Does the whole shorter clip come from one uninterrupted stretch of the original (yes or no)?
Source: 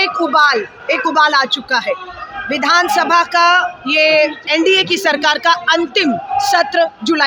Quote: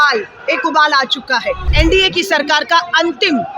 no